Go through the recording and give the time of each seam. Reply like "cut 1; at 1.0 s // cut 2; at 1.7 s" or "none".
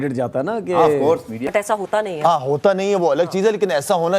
cut 1; at 1.4 s